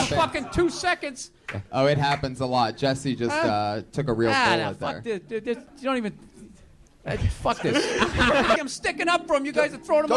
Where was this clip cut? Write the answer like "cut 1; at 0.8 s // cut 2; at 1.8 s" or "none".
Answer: cut 1; at 8.6 s